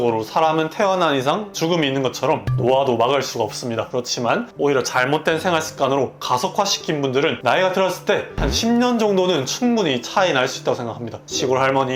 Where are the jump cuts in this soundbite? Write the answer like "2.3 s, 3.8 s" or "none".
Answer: 1.5 s, 4.5 s, 7.4 s